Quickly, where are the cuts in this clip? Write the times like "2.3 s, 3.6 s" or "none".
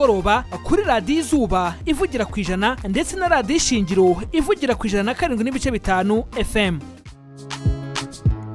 7.6 s